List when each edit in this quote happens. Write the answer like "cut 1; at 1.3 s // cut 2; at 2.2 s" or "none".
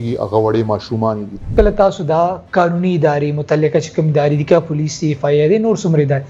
cut 1; at 1.5 s